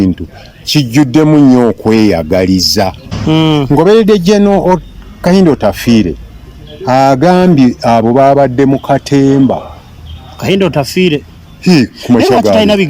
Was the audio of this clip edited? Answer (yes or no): yes